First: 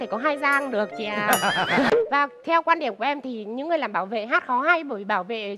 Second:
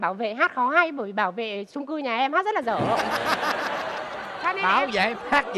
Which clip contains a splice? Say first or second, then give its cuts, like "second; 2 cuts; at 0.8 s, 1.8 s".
first; 1 cut; at 1.9 s